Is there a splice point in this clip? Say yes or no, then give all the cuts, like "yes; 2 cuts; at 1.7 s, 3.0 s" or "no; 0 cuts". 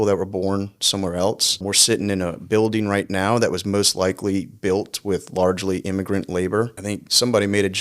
yes; 2 cuts; at 1.6 s, 6.8 s